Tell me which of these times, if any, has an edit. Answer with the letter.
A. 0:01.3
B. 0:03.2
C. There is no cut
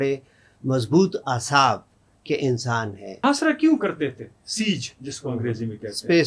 B